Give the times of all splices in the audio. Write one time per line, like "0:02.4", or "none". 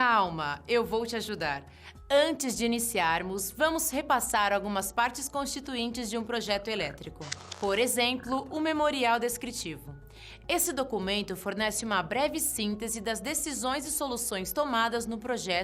0:04.9